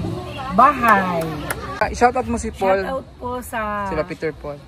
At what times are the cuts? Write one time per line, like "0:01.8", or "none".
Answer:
0:01.8